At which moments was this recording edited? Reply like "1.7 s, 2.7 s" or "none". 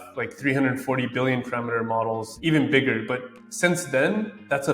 2.3 s